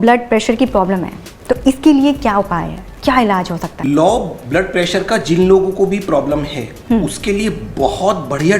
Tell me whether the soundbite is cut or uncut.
cut